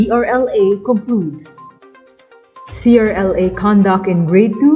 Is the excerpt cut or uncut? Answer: cut